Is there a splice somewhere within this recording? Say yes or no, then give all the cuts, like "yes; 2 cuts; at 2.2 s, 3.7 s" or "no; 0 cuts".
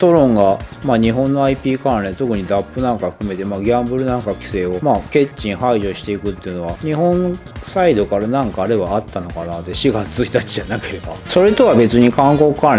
no; 0 cuts